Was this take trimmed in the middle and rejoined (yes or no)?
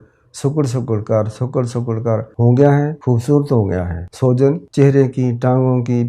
yes